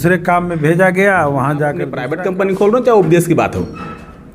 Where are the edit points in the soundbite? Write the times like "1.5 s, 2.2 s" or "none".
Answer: 2.0 s